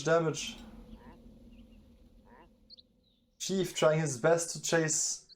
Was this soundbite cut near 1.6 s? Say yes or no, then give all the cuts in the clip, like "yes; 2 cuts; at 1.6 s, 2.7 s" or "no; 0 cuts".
no; 0 cuts